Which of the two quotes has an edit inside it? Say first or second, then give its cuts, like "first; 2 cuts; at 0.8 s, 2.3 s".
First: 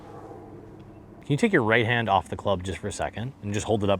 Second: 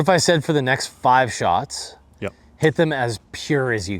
first; 1 cut; at 1.1 s